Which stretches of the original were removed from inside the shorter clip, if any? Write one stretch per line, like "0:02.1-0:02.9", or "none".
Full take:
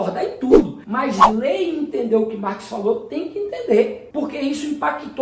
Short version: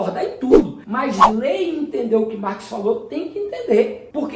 none